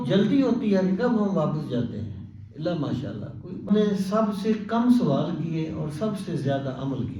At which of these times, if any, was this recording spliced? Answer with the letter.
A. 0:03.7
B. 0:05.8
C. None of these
A